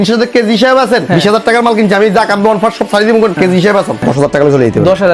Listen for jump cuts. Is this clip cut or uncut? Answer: cut